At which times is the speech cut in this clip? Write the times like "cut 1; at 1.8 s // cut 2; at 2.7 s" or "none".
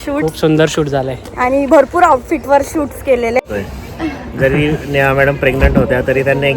cut 1; at 3.4 s